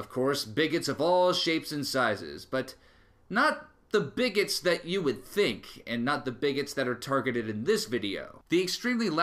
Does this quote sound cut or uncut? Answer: uncut